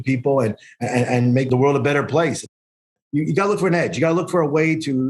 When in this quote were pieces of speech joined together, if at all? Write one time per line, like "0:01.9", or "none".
0:01.5
0:02.6